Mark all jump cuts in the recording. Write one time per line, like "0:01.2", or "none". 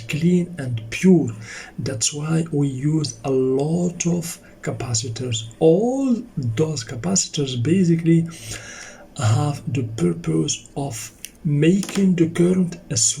none